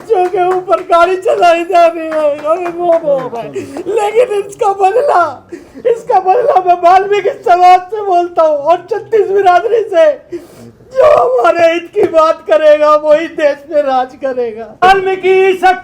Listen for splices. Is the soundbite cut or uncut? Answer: cut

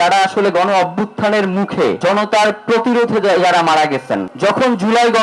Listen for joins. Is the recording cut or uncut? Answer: cut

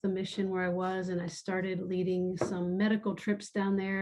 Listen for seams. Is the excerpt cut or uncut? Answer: uncut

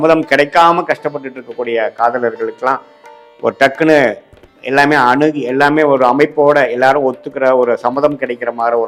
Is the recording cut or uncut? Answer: uncut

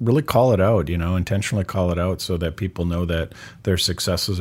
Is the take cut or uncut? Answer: uncut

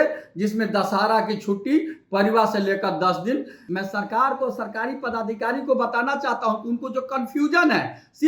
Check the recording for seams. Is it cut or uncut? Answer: cut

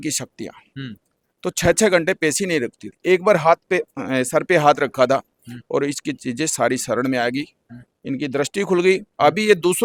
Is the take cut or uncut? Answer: uncut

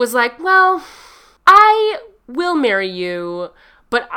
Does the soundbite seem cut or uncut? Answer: uncut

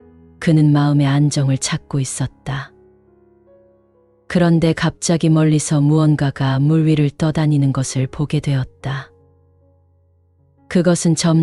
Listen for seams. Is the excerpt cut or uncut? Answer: uncut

